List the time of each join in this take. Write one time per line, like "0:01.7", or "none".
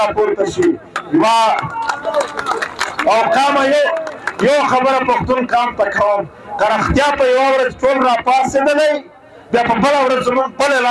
none